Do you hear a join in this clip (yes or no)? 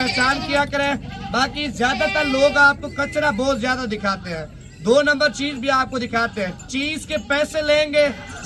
no